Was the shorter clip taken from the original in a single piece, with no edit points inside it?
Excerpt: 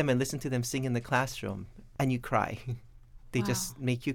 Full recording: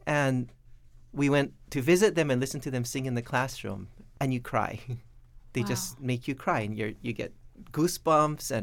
yes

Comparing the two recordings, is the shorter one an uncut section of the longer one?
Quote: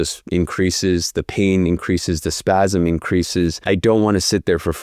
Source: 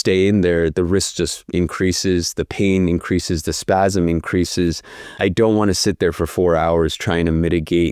no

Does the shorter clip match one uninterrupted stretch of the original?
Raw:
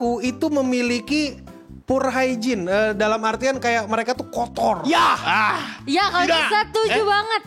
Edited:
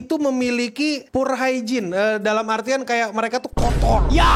no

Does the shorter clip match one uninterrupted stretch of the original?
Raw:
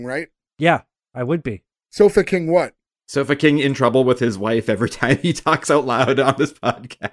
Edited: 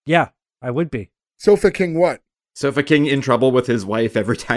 yes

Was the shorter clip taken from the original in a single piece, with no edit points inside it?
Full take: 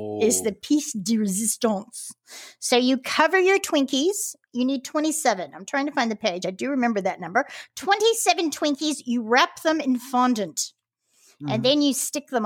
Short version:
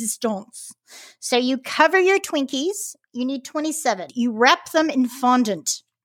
no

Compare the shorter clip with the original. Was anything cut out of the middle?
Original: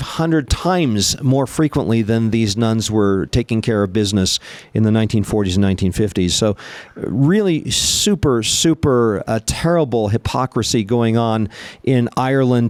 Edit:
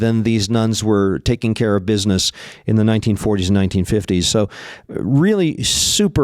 no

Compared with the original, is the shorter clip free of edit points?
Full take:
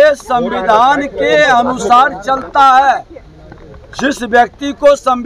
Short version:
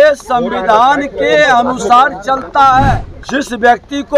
no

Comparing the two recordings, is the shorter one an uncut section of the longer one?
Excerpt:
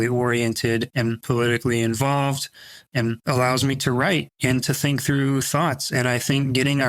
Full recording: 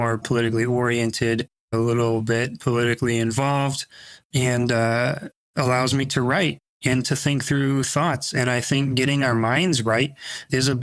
no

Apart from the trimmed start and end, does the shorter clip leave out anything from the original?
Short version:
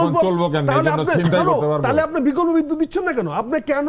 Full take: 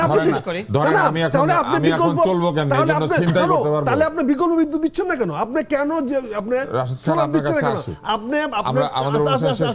no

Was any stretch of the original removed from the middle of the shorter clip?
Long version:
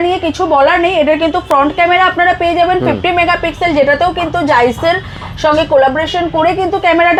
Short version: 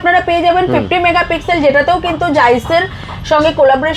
no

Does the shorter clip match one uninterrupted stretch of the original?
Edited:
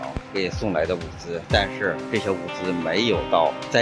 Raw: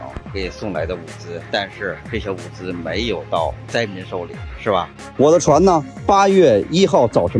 yes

